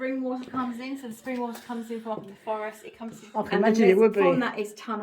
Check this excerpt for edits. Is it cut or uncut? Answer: cut